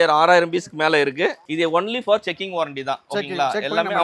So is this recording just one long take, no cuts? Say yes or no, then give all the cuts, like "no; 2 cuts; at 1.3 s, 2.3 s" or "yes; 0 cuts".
yes; 0 cuts